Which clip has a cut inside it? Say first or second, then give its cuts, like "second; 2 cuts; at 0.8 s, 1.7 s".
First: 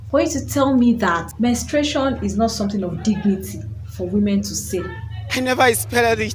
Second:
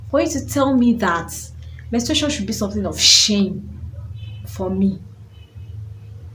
first; 1 cut; at 1.3 s